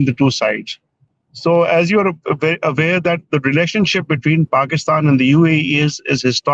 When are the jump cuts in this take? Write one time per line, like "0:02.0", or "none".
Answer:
none